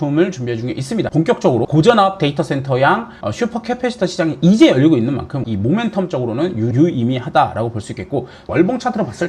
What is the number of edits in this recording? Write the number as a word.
three